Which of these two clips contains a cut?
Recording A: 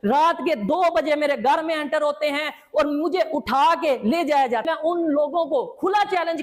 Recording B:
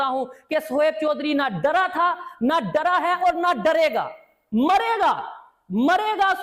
A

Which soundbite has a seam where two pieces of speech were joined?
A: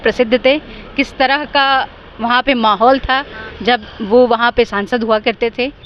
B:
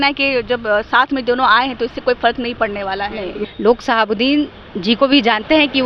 B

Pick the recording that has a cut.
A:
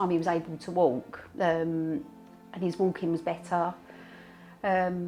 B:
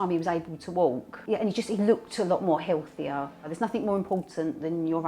B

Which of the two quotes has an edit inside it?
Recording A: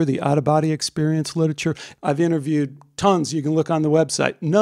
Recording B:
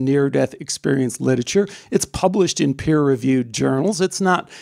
A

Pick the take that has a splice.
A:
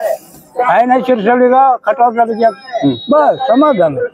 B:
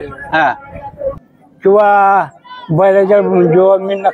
B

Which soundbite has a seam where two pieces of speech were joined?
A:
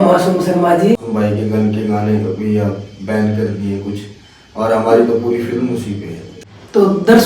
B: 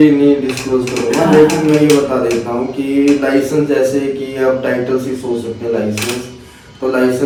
A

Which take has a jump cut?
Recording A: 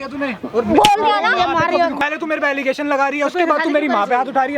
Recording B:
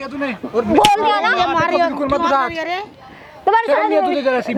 A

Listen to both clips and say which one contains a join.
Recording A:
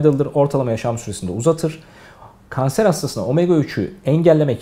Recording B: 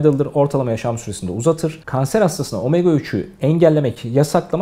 B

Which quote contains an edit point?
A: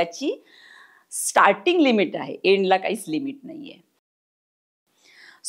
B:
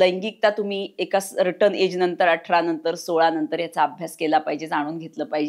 A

